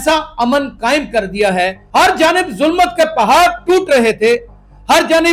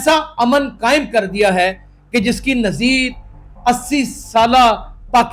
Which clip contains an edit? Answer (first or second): first